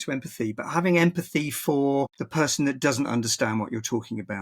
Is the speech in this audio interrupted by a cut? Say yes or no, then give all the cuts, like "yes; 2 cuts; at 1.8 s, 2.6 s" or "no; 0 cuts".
yes; 1 cut; at 2.2 s